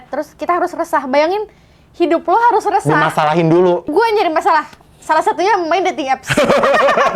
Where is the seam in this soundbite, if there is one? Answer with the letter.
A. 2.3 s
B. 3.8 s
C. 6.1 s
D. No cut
B